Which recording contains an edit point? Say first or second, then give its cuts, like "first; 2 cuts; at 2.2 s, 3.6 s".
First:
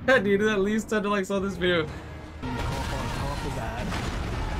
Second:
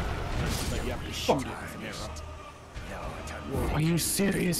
first; 1 cut; at 2.4 s